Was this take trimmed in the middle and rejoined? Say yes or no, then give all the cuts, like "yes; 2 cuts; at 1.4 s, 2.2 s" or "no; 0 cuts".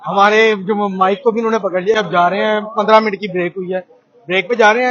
yes; 1 cut; at 2.0 s